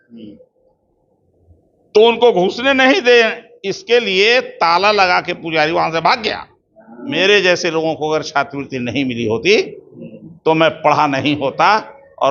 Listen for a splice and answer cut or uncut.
cut